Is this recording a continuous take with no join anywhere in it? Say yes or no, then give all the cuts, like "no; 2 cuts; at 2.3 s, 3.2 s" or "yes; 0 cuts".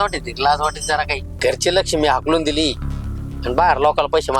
no; 1 cut; at 1.2 s